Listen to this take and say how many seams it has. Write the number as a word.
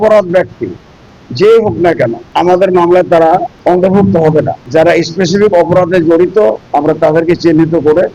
four